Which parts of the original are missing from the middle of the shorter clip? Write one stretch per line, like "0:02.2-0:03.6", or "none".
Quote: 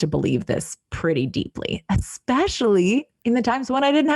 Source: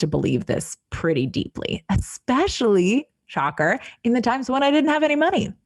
0:03.1-0:03.9